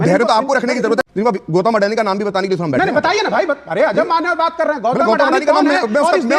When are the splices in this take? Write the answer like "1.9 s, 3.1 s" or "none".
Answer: 1.0 s